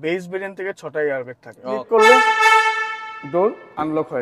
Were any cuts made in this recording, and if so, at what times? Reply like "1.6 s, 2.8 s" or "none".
1.7 s